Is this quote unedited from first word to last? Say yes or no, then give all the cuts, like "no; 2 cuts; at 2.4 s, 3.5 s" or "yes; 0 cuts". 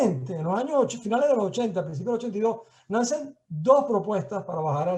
yes; 0 cuts